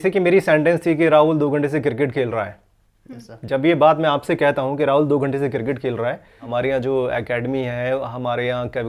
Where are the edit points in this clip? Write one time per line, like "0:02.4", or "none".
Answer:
0:06.3